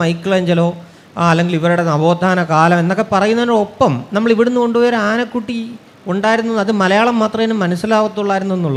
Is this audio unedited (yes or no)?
yes